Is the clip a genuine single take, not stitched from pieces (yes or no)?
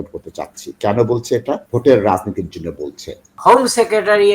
no